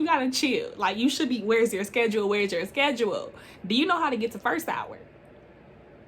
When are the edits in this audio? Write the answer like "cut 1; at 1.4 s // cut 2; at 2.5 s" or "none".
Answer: none